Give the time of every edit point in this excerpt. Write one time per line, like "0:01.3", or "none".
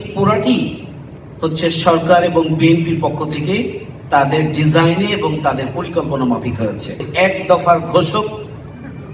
0:07.0